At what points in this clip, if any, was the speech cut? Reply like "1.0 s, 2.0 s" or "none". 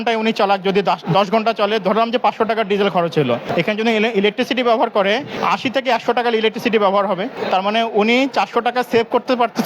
3.4 s, 5.3 s, 7.4 s